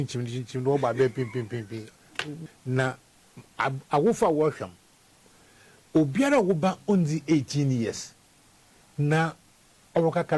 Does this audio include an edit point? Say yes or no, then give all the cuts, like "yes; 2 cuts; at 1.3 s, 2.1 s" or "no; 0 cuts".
yes; 1 cut; at 2.4 s